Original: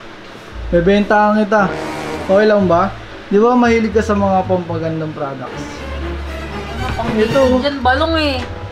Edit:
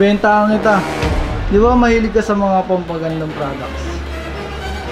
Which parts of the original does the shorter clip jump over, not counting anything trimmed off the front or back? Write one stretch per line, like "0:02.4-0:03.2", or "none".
0:02.1-0:03.0